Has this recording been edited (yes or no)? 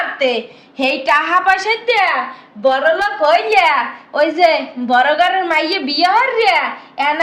no